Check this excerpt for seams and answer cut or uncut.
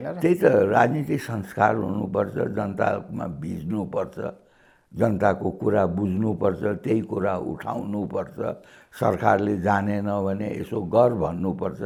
uncut